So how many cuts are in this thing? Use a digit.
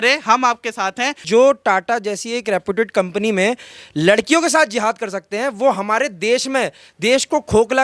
1